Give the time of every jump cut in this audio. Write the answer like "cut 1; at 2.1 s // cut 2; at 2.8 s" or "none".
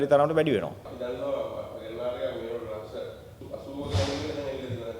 cut 1; at 0.9 s // cut 2; at 3.3 s